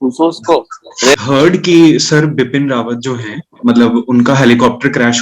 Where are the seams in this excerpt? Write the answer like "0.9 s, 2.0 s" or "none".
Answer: 1.2 s